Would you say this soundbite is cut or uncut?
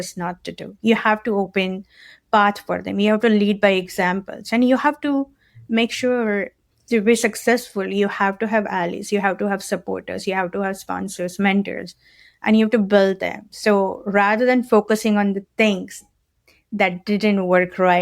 cut